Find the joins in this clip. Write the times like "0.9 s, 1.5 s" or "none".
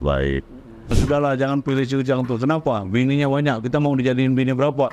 1.0 s